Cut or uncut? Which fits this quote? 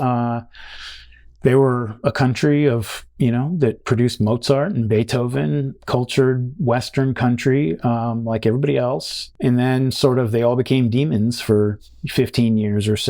cut